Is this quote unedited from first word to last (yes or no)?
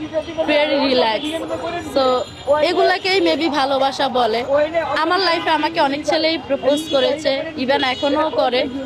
yes